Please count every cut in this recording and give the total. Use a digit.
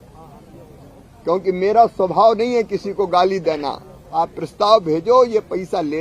1